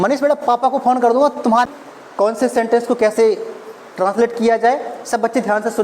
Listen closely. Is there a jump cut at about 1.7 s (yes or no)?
yes